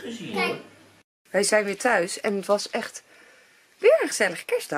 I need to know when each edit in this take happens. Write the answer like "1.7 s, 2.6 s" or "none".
1.0 s

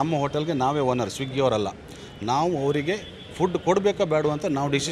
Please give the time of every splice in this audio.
none

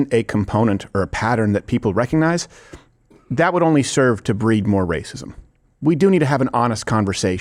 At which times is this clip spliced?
none

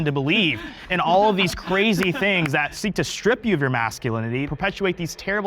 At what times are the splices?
2.7 s, 4.5 s

